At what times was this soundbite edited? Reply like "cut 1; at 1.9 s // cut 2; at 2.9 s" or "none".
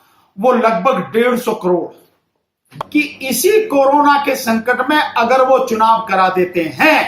cut 1; at 2.7 s